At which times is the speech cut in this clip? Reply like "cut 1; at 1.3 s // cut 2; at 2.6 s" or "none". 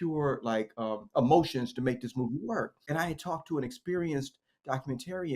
cut 1; at 2.8 s

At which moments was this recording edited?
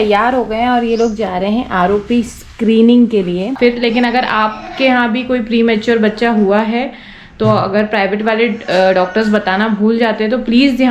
cut 1; at 3.5 s

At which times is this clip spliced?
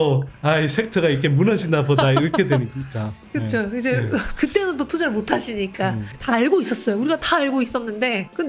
cut 1; at 6.1 s

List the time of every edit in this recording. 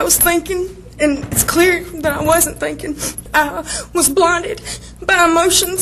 cut 1; at 3.1 s

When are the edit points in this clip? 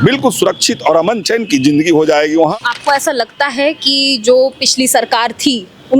cut 1; at 1.2 s // cut 2; at 2.5 s

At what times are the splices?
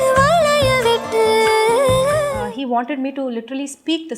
cut 1; at 2.4 s

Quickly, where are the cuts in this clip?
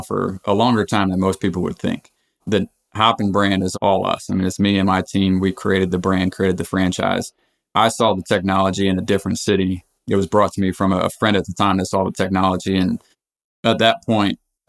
cut 1; at 11.1 s

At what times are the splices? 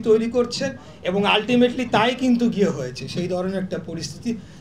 none

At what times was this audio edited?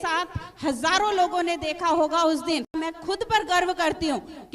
cut 1; at 2.7 s

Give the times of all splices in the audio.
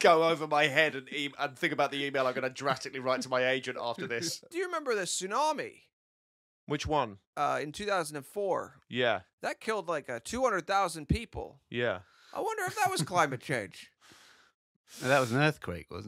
cut 1; at 4.5 s

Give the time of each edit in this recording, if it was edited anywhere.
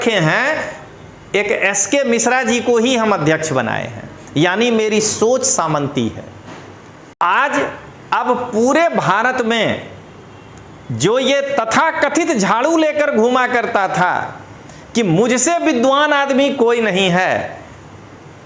cut 1; at 7.1 s

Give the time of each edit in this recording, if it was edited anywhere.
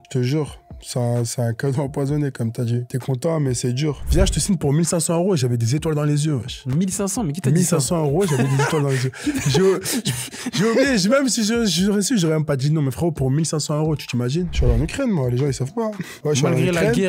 cut 1; at 4.0 s // cut 2; at 14.5 s

